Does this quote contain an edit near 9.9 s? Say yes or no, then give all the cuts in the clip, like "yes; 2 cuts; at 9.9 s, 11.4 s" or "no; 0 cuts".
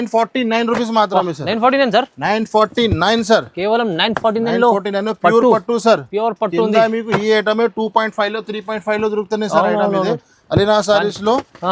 no; 0 cuts